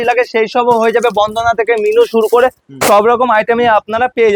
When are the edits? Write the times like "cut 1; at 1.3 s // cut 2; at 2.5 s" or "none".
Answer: none